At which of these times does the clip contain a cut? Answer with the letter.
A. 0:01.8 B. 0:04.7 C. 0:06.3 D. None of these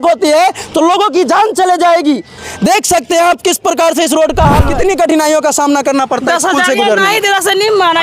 B